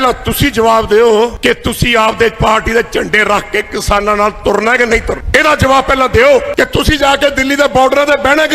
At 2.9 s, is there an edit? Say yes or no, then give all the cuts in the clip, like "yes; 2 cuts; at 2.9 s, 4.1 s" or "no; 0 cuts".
no; 3 cuts; at 1.4 s, 5.2 s, 6.5 s